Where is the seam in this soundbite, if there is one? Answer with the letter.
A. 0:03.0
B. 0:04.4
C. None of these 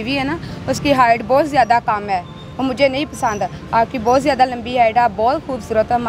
C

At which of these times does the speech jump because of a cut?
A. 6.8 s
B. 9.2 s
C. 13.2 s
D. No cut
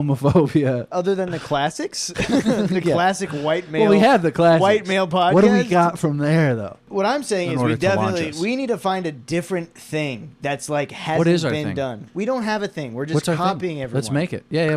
A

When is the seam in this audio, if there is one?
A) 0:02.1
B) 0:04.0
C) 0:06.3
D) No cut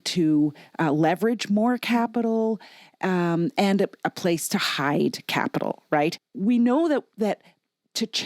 C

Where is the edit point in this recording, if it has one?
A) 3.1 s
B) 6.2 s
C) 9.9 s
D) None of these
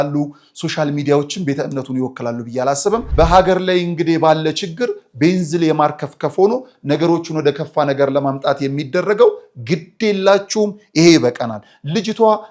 A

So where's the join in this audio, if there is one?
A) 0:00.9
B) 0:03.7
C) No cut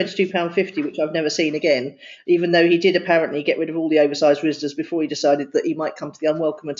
C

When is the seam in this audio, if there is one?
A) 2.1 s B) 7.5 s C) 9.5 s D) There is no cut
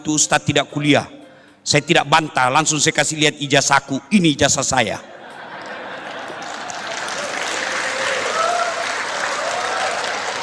D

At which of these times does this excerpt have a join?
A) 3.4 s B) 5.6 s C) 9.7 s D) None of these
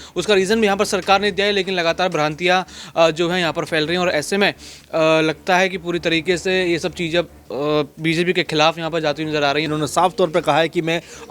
C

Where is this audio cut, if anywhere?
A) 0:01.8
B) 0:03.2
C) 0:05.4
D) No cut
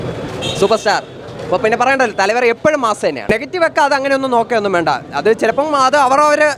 D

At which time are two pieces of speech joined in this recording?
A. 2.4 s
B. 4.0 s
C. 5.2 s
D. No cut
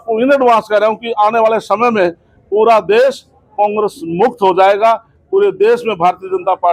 D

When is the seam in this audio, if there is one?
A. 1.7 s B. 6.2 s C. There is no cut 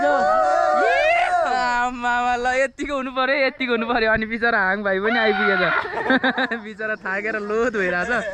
C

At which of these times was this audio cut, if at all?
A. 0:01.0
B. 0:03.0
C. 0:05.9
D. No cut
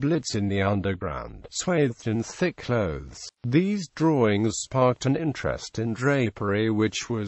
C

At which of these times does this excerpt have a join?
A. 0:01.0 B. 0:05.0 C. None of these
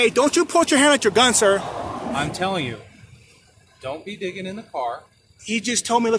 C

